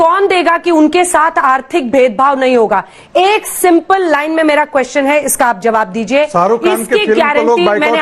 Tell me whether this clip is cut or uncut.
uncut